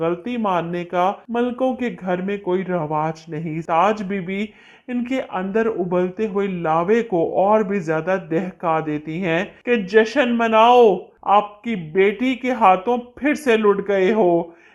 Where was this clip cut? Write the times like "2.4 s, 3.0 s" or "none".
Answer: 3.6 s